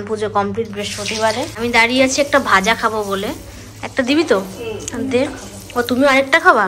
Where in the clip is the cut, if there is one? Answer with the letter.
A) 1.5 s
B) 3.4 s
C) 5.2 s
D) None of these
A